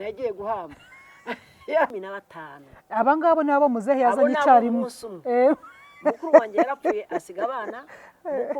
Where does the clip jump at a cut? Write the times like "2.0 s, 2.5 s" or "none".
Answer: 1.9 s